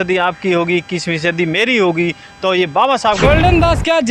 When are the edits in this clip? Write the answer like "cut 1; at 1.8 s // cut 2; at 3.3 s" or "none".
cut 1; at 3.2 s

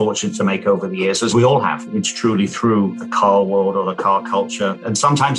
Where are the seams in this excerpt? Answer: none

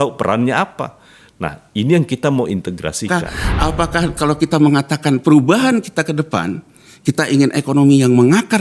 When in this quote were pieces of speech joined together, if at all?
cut 1; at 3.1 s

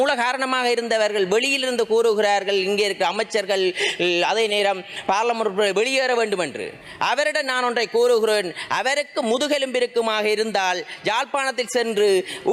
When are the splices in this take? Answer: none

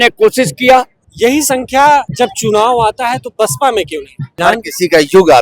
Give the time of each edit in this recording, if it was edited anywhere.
cut 1; at 1.0 s // cut 2; at 2.1 s // cut 3; at 4.4 s

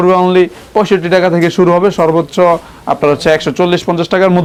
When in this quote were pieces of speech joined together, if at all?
none

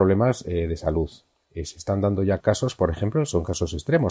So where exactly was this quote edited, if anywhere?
cut 1; at 2.4 s

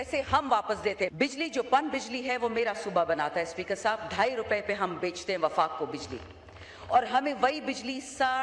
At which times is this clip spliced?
cut 1; at 1.1 s

